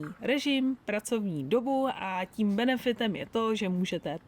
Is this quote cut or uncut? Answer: uncut